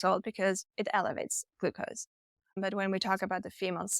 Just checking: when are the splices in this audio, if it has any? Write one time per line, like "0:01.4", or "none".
0:02.5